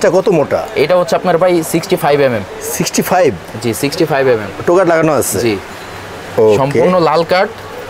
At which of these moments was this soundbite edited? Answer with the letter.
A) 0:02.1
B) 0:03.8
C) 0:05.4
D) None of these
D